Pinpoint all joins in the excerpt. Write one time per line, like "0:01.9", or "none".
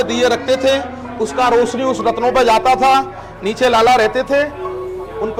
none